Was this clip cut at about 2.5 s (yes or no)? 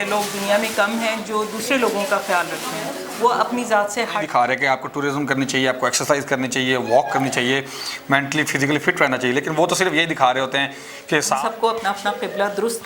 no